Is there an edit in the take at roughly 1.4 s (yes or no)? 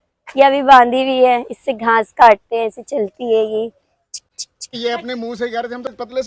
no